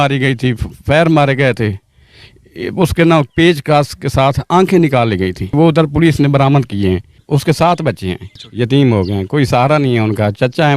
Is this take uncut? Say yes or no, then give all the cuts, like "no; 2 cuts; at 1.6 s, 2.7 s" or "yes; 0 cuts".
no; 3 cuts; at 5.5 s, 7.1 s, 8.4 s